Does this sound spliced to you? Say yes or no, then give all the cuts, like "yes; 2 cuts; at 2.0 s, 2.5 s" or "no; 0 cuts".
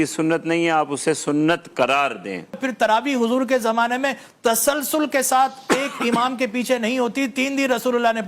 yes; 1 cut; at 2.6 s